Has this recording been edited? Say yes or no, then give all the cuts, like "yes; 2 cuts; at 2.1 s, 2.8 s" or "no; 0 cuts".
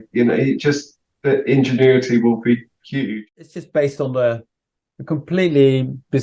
yes; 1 cut; at 3.2 s